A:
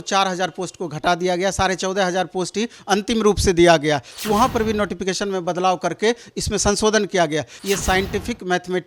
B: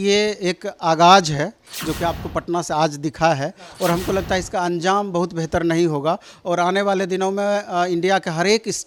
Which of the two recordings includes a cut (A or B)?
A